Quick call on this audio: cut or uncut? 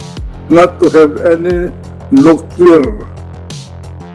cut